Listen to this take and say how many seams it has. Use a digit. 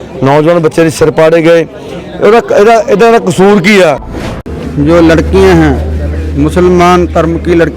1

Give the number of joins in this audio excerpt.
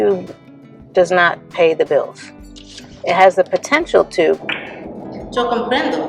1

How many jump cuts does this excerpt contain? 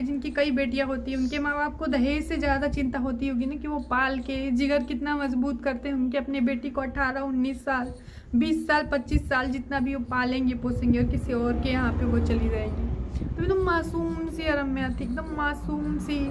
0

